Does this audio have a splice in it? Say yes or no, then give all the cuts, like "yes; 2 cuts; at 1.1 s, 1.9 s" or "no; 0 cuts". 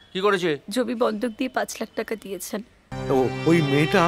yes; 1 cut; at 2.9 s